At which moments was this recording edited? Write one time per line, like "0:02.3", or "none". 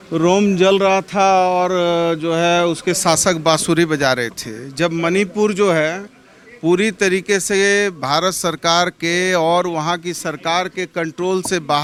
none